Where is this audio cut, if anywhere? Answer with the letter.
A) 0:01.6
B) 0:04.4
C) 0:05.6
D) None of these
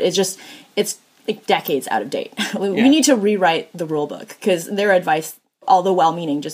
D